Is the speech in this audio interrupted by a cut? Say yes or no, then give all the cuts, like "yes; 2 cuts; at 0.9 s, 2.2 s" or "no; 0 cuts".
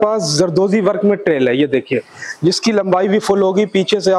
no; 0 cuts